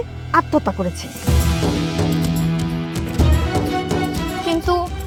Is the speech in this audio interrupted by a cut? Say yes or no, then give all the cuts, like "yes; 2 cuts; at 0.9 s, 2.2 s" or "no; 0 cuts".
no; 0 cuts